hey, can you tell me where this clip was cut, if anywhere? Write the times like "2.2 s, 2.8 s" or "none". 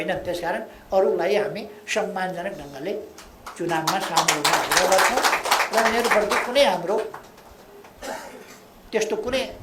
none